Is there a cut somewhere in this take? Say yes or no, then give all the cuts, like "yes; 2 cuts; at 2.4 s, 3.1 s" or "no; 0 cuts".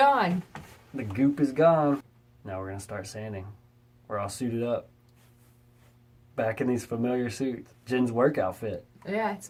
no; 0 cuts